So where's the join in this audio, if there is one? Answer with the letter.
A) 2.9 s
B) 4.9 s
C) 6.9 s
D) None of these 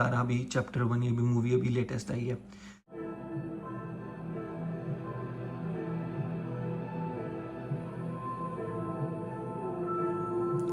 A